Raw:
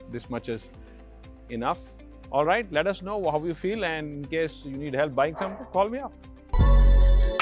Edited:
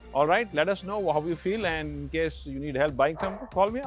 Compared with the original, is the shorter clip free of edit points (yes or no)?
yes